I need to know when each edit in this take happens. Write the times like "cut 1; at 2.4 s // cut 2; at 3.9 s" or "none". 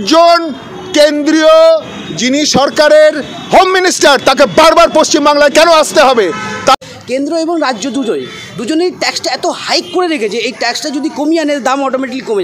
cut 1; at 6.7 s